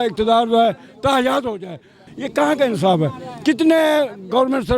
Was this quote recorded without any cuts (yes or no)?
yes